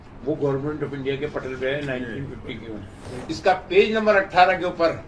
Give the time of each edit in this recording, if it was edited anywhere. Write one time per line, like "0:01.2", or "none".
0:03.1